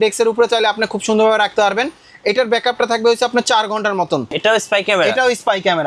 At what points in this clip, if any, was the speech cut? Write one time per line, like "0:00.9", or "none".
0:04.4